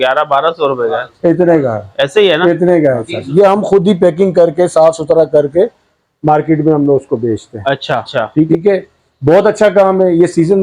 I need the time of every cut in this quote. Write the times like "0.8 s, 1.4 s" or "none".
3.1 s, 8.5 s

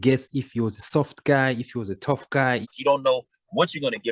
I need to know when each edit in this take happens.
2.7 s

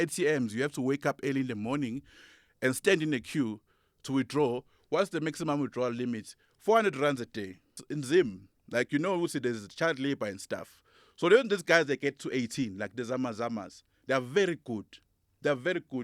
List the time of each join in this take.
7.9 s

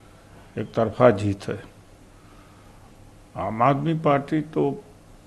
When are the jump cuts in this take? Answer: none

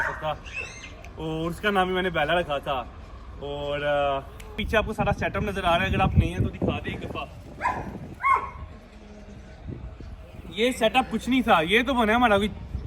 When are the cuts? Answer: 4.6 s

